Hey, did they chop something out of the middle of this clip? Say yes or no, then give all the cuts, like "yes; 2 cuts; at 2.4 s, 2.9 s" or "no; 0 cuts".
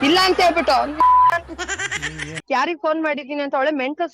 yes; 1 cut; at 2.4 s